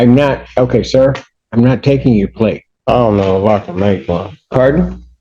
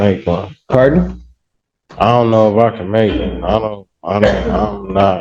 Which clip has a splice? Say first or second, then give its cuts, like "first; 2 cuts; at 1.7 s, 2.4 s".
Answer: first; 1 cut; at 2.7 s